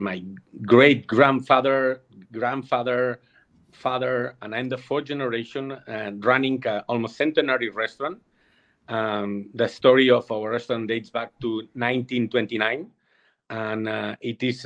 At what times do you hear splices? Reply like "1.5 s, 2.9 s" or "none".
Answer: none